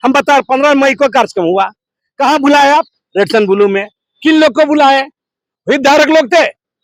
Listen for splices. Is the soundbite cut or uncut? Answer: uncut